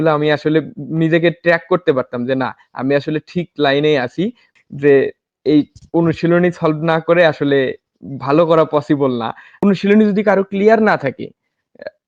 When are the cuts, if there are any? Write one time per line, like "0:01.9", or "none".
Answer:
0:04.5
0:09.4